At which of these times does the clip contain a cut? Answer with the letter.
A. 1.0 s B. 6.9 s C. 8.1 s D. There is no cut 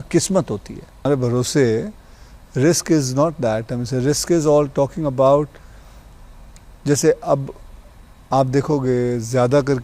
A